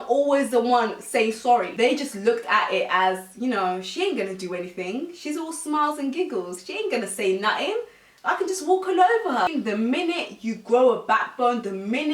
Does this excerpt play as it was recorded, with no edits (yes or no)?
no